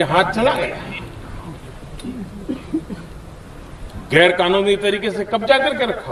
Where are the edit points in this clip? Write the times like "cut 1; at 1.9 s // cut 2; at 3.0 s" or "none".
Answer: none